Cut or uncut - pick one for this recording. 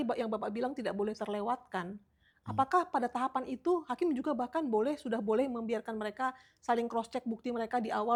uncut